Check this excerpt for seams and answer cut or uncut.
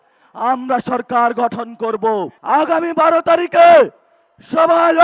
cut